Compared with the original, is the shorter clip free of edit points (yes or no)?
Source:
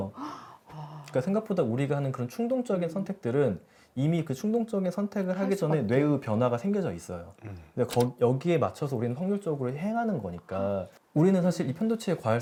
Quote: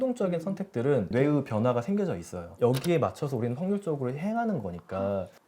no